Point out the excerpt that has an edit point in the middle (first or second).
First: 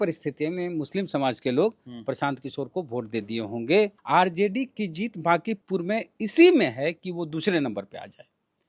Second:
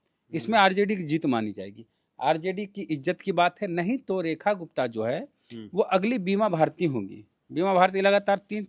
first